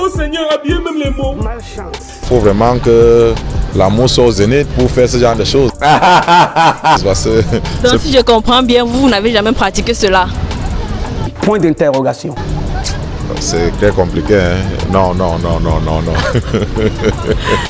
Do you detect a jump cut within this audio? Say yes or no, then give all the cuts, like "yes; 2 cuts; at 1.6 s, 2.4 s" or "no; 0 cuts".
no; 0 cuts